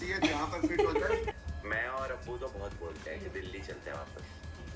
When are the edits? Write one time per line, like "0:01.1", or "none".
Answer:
0:01.3